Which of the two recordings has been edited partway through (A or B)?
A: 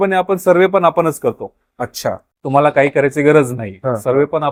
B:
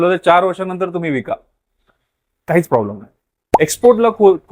B